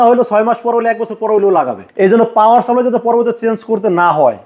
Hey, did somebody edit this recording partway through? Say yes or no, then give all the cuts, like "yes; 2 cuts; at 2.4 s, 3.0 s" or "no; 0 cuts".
yes; 1 cut; at 1.8 s